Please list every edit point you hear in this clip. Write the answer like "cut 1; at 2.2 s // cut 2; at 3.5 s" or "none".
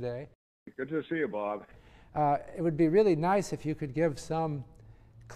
none